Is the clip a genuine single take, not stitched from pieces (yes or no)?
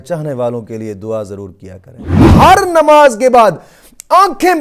no